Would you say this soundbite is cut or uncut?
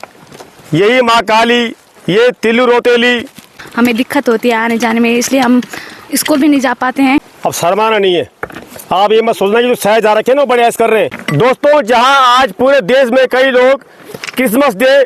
cut